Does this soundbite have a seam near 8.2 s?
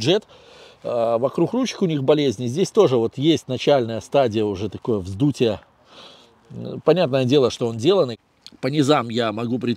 yes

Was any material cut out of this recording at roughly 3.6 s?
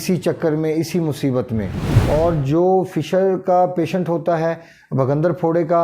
no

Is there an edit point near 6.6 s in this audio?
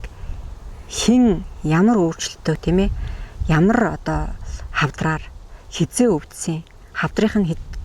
no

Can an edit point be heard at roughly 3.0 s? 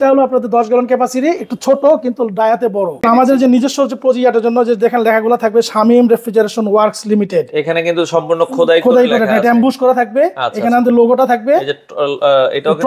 yes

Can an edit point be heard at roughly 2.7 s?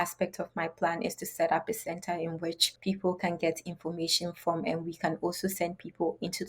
yes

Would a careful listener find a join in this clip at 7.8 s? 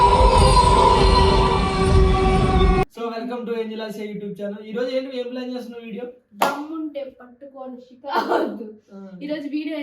no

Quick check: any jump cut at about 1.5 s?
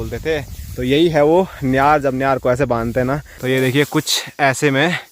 no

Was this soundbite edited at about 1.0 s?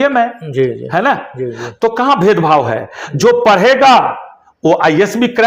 no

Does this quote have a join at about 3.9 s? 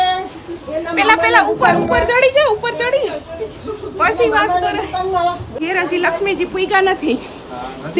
no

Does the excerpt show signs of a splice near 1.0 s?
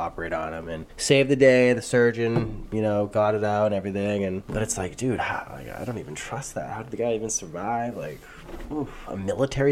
no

